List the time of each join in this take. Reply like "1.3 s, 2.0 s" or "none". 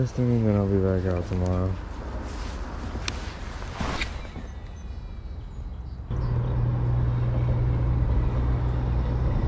6.1 s